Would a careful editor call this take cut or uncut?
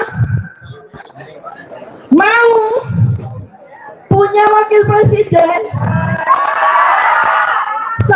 uncut